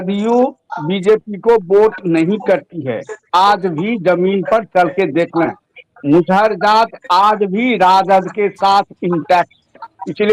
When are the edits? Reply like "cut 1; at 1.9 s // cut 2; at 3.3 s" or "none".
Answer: none